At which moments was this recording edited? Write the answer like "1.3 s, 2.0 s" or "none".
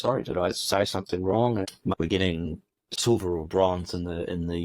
1.8 s, 2.9 s